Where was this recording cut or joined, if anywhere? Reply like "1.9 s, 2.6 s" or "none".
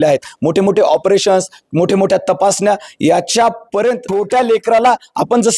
4.0 s